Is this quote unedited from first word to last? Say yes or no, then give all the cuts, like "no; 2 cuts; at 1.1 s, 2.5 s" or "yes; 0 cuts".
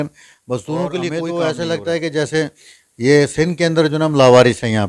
no; 1 cut; at 1.0 s